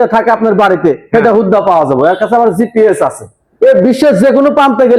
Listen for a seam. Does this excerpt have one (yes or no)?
no